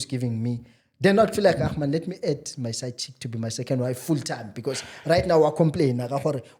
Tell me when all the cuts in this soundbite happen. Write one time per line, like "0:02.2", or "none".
none